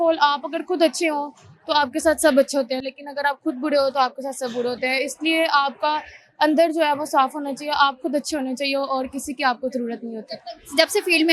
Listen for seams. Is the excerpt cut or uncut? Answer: uncut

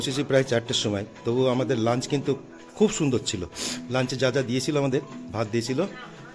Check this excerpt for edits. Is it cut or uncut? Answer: uncut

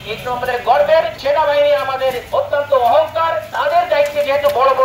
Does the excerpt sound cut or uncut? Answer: cut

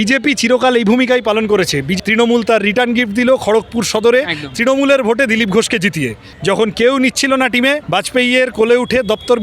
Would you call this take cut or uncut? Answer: cut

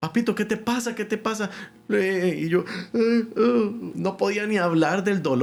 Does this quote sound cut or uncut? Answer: uncut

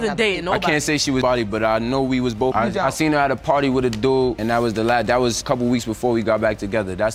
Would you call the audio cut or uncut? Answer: uncut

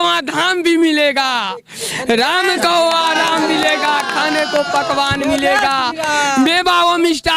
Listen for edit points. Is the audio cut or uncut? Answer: uncut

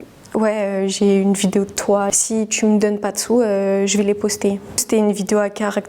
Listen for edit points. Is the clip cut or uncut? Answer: cut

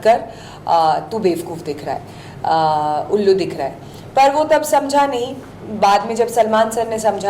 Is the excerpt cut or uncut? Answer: uncut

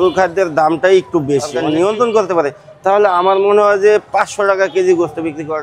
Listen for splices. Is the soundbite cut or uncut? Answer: cut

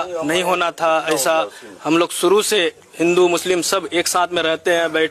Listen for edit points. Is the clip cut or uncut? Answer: uncut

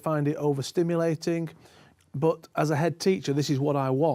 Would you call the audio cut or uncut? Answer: uncut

